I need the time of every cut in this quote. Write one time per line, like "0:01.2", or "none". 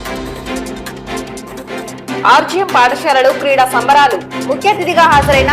0:02.2